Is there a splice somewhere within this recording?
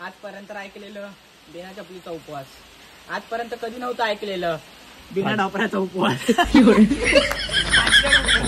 no; 0 cuts

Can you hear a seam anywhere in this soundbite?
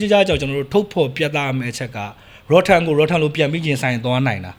no; 0 cuts

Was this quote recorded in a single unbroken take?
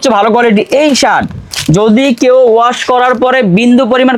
yes; 0 cuts

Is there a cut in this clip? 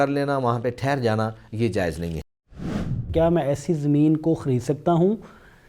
yes; 1 cut; at 2.6 s

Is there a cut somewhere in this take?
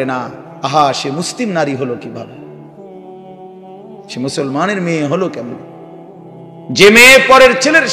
yes; 2 cuts; at 2.3 s, 3.8 s

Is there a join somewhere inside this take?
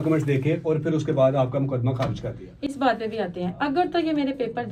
no; 0 cuts

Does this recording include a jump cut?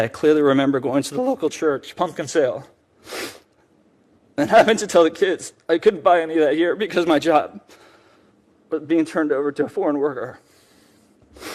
no; 0 cuts

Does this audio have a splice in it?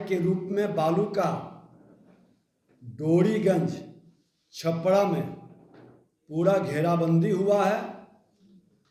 no; 0 cuts

